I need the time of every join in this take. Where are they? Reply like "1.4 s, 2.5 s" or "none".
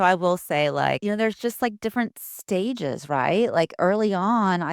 1.0 s